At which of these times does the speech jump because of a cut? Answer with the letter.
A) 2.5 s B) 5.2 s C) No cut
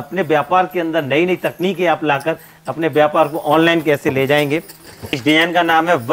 B